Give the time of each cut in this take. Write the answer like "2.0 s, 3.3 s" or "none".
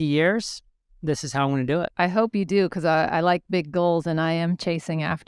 1.9 s